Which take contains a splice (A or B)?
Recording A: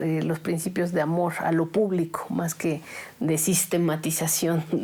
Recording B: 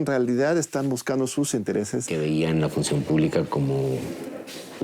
B